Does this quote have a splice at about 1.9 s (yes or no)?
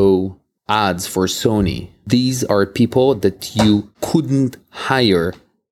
yes